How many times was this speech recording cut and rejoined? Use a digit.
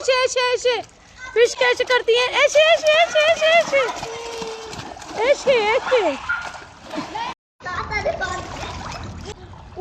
0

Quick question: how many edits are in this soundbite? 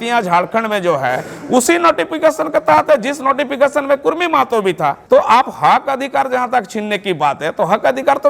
1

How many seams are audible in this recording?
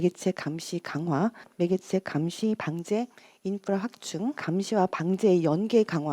2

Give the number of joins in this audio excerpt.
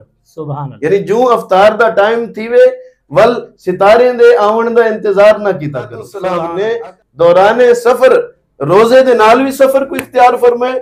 1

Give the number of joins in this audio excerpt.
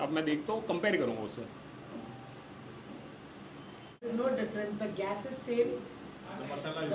1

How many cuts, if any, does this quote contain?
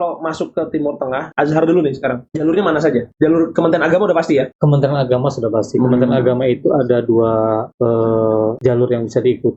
6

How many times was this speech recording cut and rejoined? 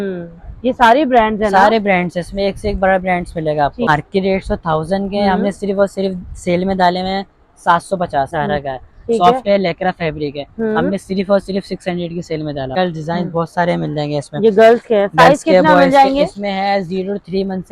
3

